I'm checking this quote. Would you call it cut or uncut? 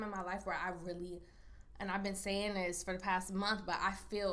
uncut